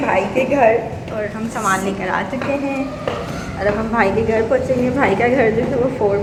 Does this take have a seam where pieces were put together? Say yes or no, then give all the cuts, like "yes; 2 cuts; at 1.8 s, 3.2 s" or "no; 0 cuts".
no; 0 cuts